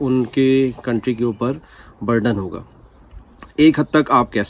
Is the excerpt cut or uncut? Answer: uncut